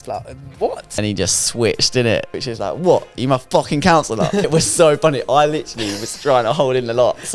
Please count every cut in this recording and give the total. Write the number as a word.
three